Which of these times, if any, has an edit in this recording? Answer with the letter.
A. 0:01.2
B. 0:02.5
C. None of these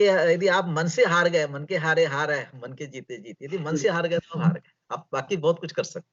C